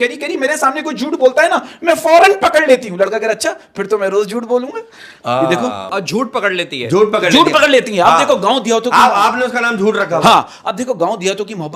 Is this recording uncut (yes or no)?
yes